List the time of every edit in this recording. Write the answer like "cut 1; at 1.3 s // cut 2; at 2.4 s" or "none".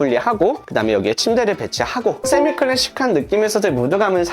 cut 1; at 2.2 s